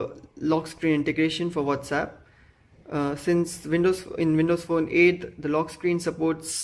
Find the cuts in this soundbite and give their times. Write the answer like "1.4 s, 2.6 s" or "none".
4.2 s